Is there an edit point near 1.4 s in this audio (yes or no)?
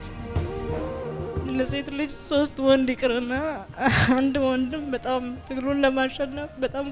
yes